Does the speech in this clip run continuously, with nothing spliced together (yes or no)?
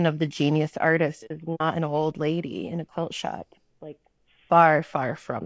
yes